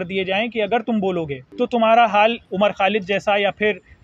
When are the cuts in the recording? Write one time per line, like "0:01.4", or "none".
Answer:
0:01.4
0:02.4